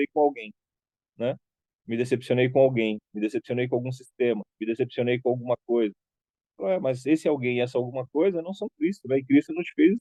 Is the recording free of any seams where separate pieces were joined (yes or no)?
yes